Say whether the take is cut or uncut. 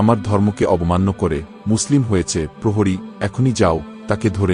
uncut